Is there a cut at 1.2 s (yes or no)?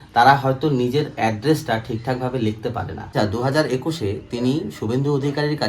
no